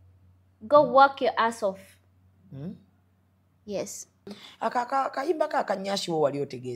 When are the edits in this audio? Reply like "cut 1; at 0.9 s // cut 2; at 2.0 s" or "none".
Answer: cut 1; at 4.4 s